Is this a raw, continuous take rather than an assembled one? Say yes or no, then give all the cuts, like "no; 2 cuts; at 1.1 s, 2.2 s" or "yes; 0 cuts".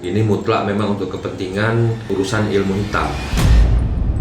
no; 2 cuts; at 2.0 s, 3.3 s